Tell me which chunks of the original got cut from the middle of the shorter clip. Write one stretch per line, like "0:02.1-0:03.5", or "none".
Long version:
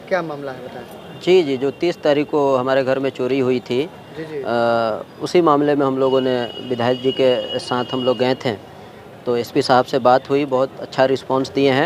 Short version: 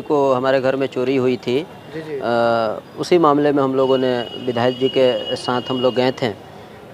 none